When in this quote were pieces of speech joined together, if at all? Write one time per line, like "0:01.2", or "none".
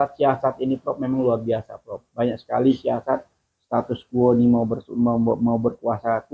none